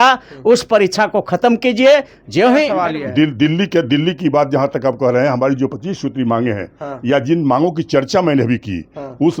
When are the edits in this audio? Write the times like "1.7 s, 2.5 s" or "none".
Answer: 2.7 s